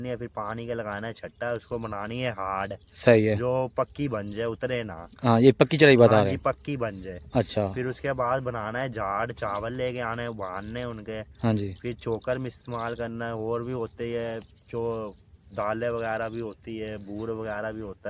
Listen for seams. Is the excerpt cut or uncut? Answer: uncut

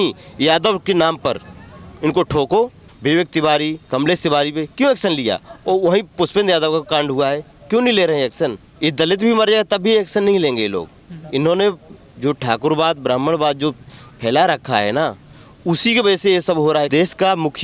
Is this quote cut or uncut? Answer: cut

